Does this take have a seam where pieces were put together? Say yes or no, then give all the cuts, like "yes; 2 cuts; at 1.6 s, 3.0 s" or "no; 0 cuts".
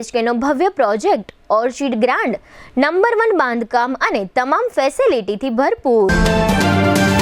yes; 1 cut; at 6.1 s